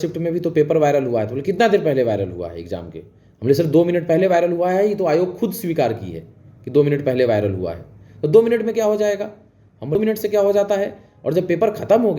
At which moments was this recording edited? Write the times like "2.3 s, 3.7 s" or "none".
9.9 s